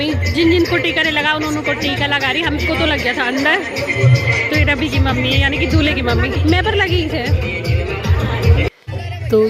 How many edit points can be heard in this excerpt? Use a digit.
0